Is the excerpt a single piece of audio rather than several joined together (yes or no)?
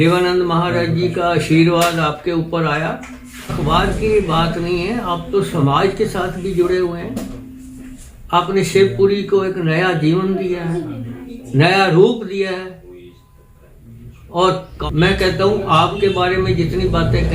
no